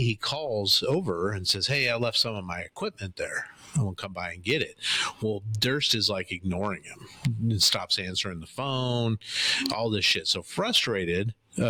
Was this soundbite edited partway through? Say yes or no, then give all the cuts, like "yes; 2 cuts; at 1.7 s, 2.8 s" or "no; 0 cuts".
no; 0 cuts